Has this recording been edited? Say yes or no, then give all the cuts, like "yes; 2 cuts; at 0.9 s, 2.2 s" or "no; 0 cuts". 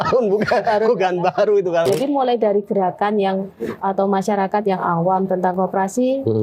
yes; 1 cut; at 1.9 s